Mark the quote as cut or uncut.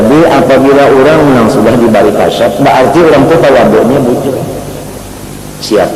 uncut